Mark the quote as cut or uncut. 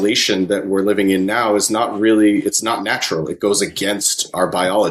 uncut